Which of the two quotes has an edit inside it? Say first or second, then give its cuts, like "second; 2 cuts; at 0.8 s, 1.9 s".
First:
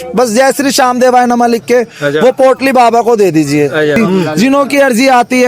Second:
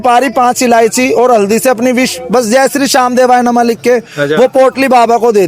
first; 1 cut; at 4.4 s